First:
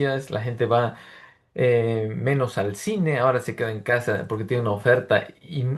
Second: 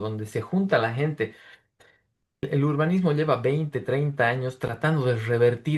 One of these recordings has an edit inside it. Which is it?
second; 1 cut; at 2.5 s

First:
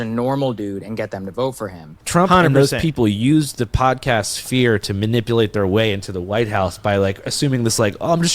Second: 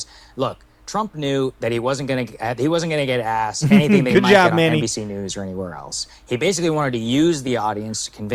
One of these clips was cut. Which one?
first; 1 cut; at 1.9 s

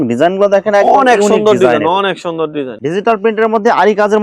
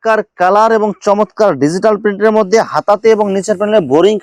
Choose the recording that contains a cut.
first; 1 cut; at 2.7 s

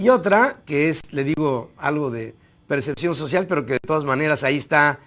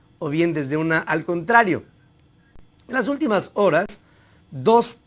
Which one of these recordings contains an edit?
second; 1 cut; at 3.3 s

